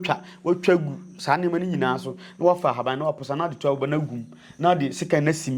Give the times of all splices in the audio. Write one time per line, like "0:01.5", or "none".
none